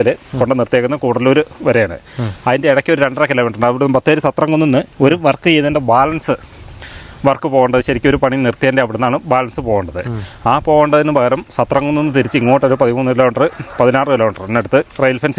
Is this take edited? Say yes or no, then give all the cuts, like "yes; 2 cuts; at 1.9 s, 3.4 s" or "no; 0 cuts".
no; 0 cuts